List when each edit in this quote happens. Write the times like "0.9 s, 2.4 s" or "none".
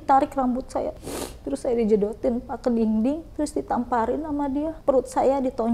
0.9 s, 4.8 s